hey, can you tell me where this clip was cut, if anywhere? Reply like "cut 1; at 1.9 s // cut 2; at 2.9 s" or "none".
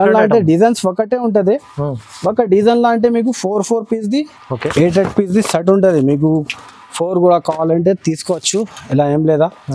cut 1; at 4.7 s